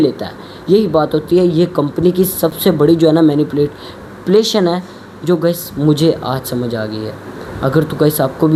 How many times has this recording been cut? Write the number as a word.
zero